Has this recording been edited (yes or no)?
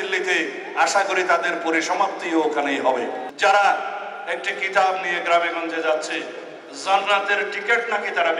yes